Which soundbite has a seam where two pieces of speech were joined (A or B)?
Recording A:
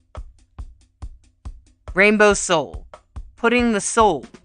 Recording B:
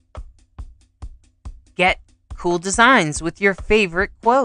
A